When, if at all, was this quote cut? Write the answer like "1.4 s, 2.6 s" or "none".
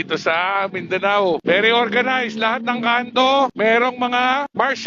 1.4 s